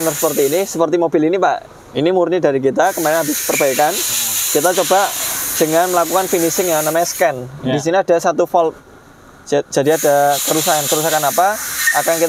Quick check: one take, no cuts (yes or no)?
yes